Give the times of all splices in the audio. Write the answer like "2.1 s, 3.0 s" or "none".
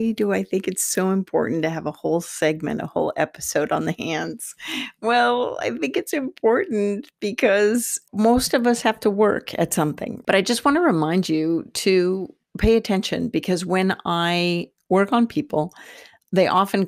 8.0 s, 10.1 s